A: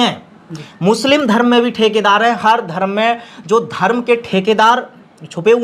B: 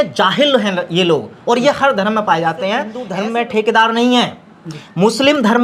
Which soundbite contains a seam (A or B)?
B